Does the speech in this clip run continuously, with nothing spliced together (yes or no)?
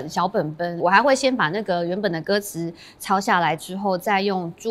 yes